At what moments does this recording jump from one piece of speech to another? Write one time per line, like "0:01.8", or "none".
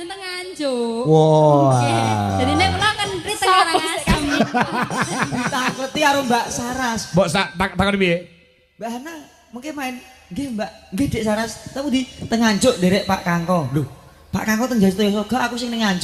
none